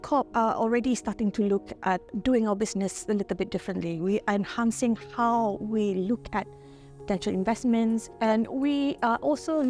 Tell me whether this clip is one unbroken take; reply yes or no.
no